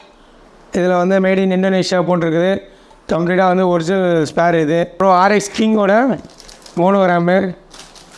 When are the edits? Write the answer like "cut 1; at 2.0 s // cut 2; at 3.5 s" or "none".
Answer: cut 1; at 5.0 s